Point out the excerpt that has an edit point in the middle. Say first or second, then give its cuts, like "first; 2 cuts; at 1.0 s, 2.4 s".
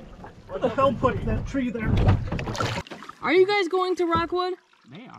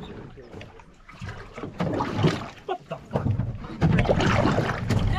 first; 1 cut; at 2.9 s